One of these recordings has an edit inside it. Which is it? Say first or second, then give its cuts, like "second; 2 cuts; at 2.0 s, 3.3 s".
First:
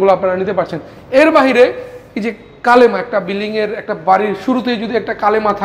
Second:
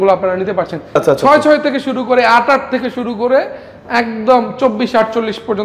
second; 1 cut; at 1.0 s